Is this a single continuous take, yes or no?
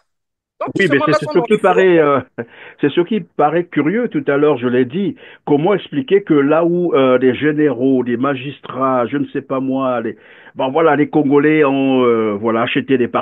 yes